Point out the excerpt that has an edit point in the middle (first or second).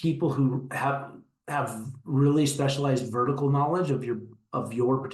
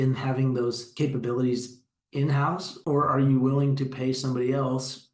second